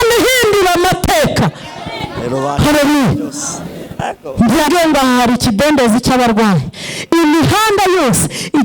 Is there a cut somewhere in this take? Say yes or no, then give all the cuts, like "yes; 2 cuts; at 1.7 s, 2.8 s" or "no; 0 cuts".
yes; 1 cut; at 4.7 s